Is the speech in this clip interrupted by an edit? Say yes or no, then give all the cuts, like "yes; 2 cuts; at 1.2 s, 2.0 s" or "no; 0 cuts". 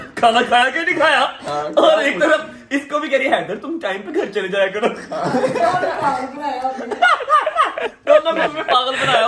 no; 0 cuts